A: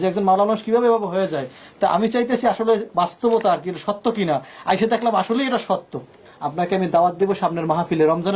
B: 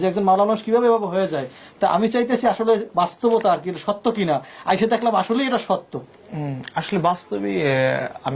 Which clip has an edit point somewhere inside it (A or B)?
A